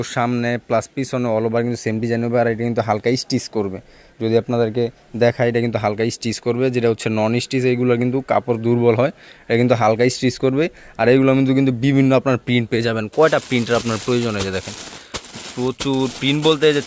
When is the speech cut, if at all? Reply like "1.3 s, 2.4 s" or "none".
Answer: none